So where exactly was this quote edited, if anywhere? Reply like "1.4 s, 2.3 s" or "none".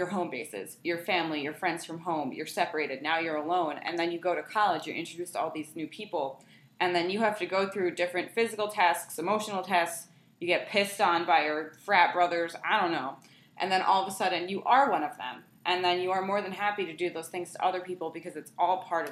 none